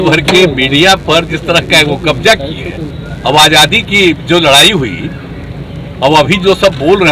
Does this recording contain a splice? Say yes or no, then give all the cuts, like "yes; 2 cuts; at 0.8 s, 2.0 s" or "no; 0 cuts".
yes; 1 cut; at 2.9 s